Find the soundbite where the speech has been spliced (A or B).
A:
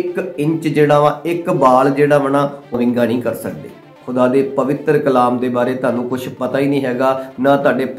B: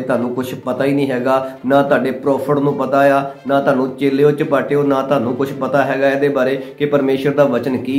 A